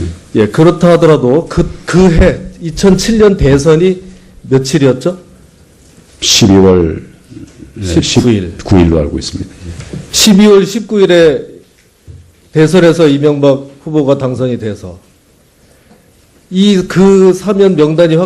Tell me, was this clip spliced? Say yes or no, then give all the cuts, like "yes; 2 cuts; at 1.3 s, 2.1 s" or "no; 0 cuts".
no; 0 cuts